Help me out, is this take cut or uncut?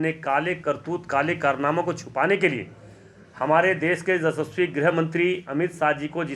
uncut